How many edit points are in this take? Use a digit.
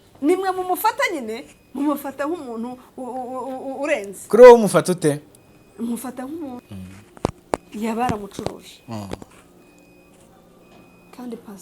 1